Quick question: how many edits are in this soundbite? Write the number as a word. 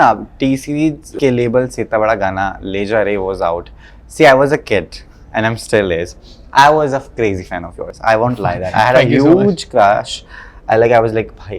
one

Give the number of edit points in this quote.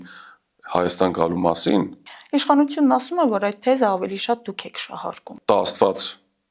two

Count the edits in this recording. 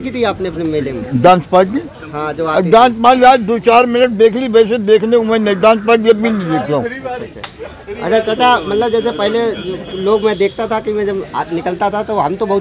zero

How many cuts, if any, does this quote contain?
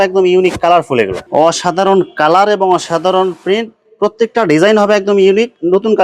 one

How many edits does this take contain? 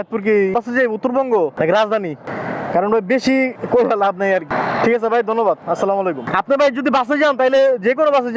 zero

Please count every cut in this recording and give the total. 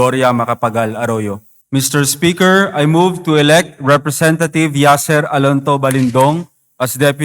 one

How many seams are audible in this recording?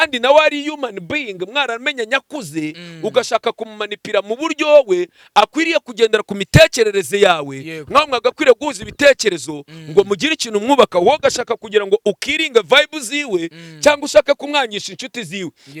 zero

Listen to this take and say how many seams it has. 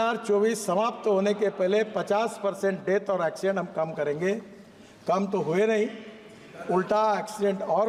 zero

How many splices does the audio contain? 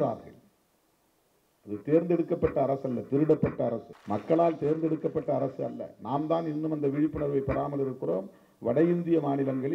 one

